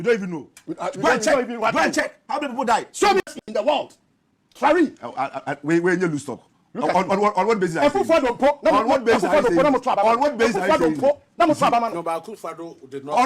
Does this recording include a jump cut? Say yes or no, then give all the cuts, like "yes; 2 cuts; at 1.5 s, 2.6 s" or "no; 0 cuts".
yes; 1 cut; at 3.2 s